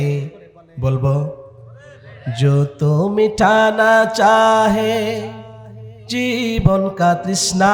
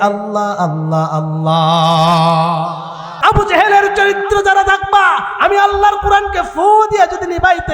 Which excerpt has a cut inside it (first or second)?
second